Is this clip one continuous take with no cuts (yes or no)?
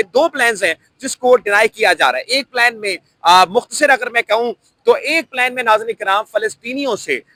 yes